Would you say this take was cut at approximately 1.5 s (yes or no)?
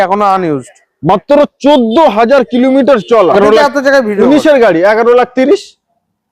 no